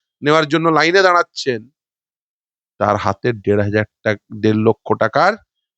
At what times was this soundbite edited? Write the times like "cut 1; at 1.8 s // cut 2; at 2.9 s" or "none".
none